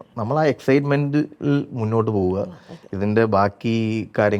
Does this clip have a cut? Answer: no; 0 cuts

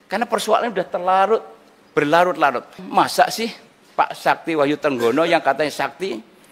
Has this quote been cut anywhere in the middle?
yes; 1 cut; at 2.8 s

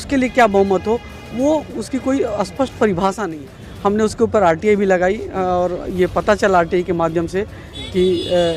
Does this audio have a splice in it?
yes; 1 cut; at 3.3 s

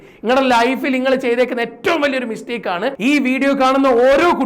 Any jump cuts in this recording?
yes; 1 cut; at 2.9 s

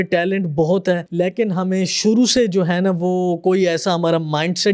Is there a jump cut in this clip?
yes; 1 cut; at 1.1 s

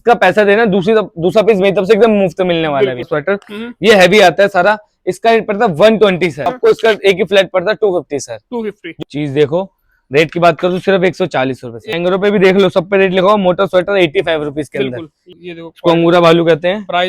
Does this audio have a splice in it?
yes; 5 cuts; at 3.1 s, 6.5 s, 8.9 s, 11.9 s, 15.2 s

